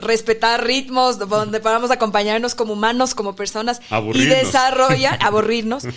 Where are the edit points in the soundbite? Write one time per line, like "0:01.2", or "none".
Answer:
none